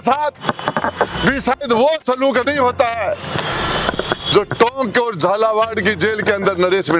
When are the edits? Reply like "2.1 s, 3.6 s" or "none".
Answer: none